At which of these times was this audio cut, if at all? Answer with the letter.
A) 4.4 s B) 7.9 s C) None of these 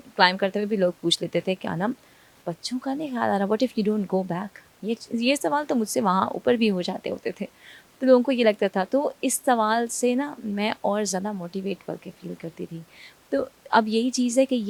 C